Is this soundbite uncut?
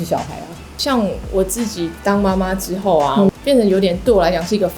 no; 1 cut; at 3.3 s

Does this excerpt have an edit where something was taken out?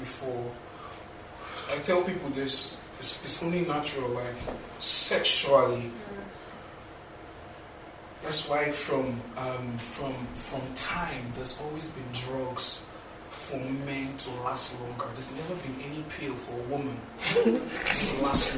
no; 0 cuts

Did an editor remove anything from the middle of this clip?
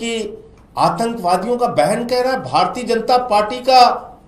no; 0 cuts

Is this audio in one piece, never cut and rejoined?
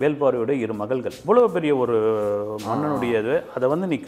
no; 1 cut; at 1.1 s

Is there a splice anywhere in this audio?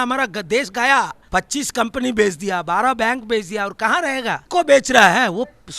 yes; 2 cuts; at 1.2 s, 4.4 s

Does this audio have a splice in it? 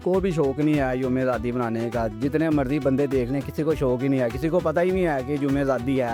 no; 0 cuts

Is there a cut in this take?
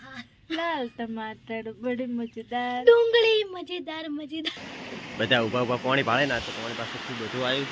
yes; 1 cut; at 4.7 s

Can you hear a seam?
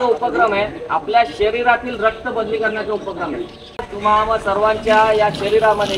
yes; 1 cut; at 3.9 s

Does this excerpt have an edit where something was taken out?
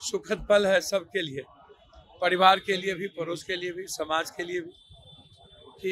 no; 0 cuts

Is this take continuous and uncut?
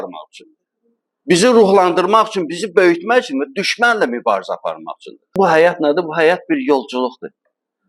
no; 1 cut; at 5.3 s

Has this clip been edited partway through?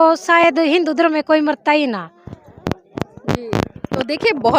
no; 0 cuts

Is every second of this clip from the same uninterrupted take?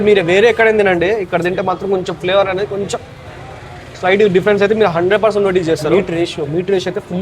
no; 1 cut; at 5.9 s

